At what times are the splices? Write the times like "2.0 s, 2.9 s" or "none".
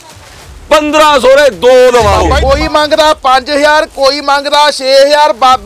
2.3 s